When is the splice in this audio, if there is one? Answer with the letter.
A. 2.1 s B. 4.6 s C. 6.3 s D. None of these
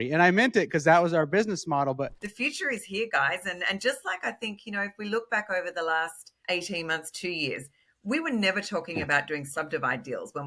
A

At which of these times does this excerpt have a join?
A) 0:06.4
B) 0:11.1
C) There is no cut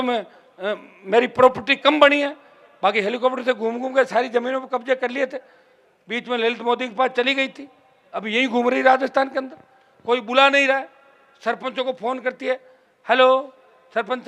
C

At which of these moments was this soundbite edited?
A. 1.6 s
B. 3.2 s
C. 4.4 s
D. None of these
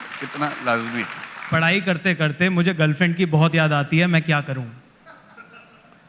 A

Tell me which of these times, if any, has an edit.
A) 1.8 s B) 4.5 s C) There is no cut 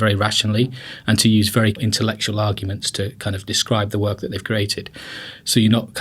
A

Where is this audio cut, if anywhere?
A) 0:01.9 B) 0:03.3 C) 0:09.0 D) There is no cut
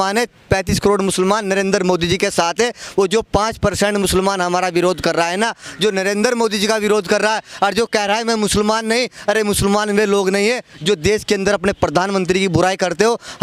D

